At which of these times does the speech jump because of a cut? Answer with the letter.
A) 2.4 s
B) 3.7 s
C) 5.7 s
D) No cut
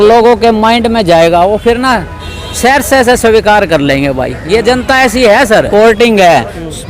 C